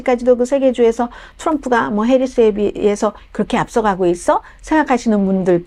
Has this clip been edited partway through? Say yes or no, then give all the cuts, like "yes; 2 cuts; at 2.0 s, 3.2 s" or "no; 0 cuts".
no; 0 cuts